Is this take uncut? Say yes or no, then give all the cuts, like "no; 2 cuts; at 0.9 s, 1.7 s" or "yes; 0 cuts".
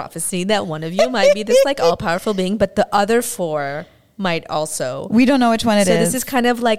yes; 0 cuts